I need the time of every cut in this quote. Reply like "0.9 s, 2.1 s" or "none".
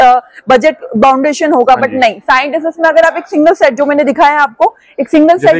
none